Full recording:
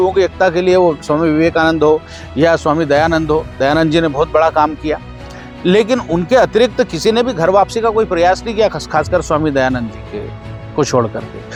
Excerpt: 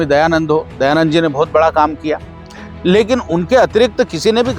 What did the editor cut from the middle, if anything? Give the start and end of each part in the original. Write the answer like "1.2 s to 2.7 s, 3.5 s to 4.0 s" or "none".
none